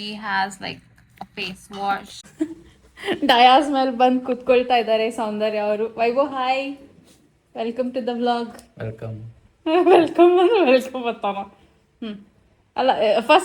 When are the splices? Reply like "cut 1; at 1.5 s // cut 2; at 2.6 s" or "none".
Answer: cut 1; at 2.2 s